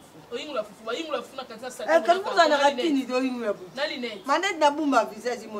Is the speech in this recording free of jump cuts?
yes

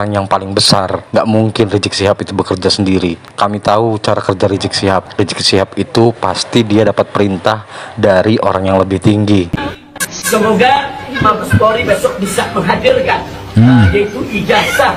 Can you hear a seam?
no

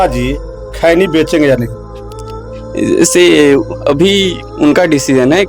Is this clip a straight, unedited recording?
yes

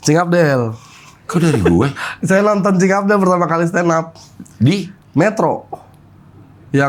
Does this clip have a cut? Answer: no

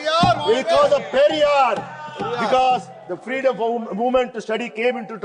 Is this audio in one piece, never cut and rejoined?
yes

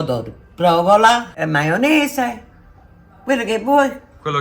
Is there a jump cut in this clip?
yes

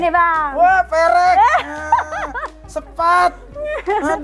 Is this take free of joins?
yes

